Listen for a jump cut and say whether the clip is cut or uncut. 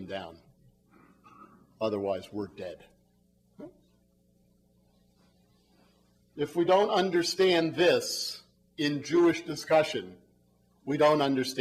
uncut